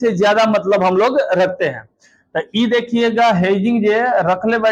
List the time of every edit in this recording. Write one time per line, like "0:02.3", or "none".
none